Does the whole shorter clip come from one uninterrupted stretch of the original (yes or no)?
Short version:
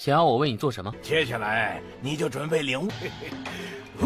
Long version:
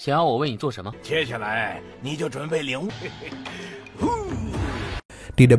yes